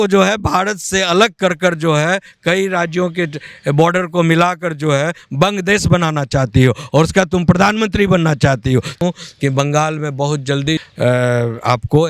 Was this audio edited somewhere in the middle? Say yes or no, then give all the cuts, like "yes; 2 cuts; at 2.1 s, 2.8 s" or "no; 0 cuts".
yes; 2 cuts; at 9.0 s, 10.8 s